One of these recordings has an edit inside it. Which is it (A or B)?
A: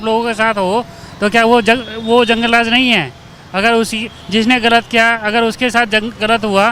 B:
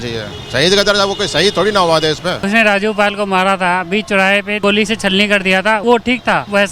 B